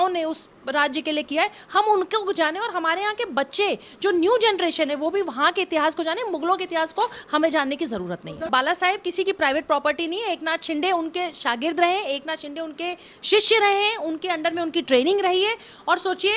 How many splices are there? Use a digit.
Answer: 1